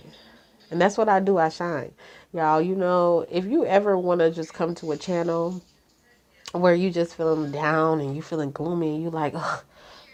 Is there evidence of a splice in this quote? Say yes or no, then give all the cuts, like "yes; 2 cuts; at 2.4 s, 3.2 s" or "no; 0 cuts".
no; 0 cuts